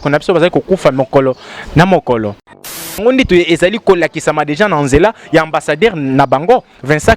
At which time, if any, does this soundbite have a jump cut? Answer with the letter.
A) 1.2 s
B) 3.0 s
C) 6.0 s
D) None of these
B